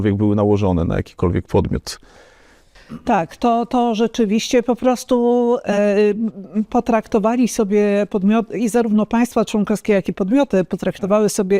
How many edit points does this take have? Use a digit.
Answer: 0